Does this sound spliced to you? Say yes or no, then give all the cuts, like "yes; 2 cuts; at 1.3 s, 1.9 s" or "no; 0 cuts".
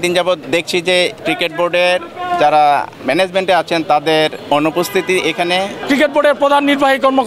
yes; 4 cuts; at 0.9 s, 2.9 s, 4.4 s, 5.8 s